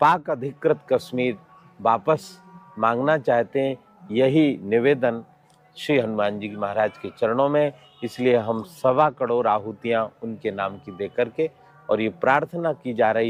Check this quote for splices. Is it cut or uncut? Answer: uncut